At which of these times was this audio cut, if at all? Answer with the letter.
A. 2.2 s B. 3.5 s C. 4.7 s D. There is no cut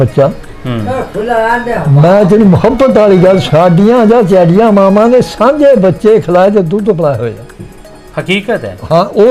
B